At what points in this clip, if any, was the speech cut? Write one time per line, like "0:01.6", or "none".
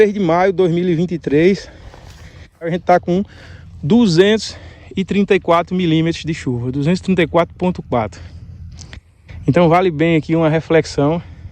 0:02.7